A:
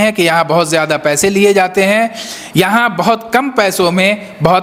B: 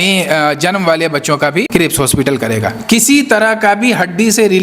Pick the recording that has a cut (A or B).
B